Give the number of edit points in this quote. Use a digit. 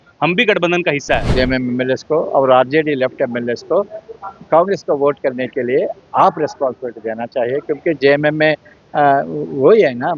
1